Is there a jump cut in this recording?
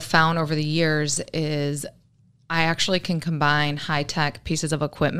no; 0 cuts

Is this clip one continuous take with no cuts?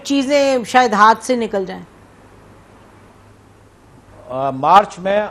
no; 1 cut; at 3.1 s

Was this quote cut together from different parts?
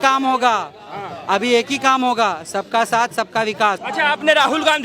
yes; 1 cut; at 3.8 s

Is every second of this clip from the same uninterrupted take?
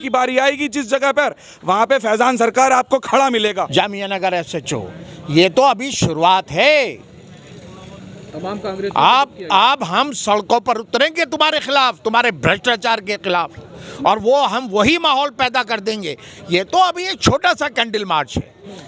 no; 1 cut; at 3.6 s

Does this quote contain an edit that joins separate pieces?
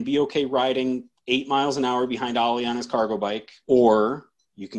yes; 1 cut; at 3.5 s

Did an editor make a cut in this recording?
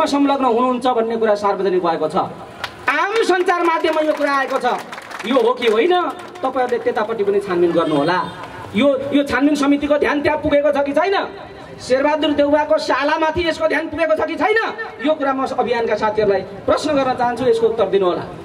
no; 0 cuts

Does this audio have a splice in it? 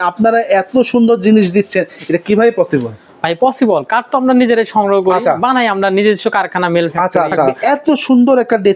yes; 1 cut; at 7.5 s

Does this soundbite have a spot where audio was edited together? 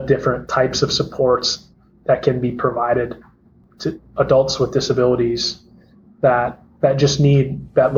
no; 0 cuts

